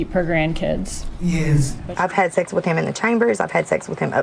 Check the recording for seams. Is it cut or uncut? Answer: cut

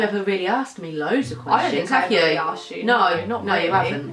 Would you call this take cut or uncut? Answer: uncut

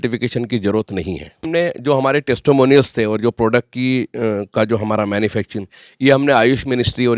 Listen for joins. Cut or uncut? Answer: cut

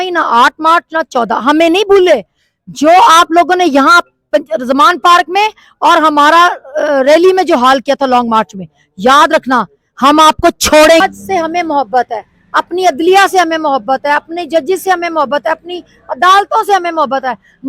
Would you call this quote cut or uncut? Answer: cut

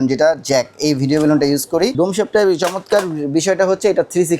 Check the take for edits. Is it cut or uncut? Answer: cut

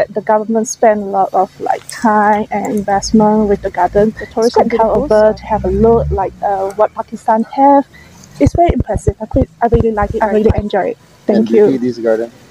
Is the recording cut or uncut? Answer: cut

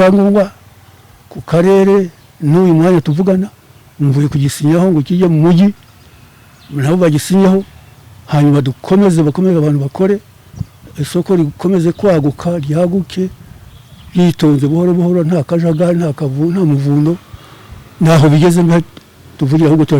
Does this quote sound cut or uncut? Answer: uncut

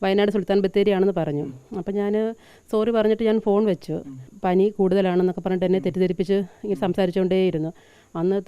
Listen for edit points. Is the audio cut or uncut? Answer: cut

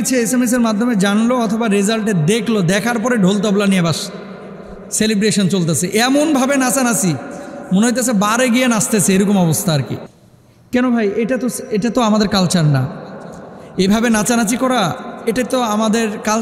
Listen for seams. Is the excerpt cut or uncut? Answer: uncut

